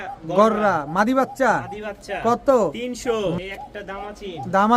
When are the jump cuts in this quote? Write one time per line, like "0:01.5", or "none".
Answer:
0:03.3